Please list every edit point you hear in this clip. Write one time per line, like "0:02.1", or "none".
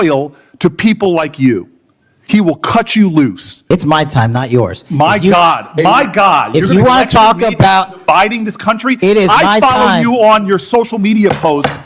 0:03.6

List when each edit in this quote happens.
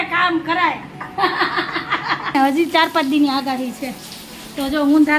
0:02.3

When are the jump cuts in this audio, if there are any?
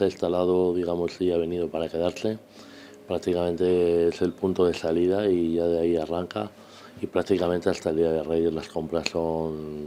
none

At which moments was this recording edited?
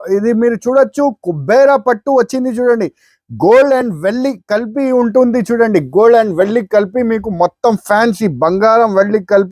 none

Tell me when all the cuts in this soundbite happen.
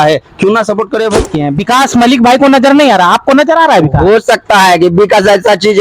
0:01.3

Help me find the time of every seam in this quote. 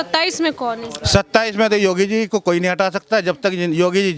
none

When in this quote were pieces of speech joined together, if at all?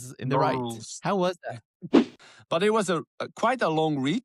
0:02.1

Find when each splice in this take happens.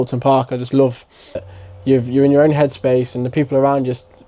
0:01.4

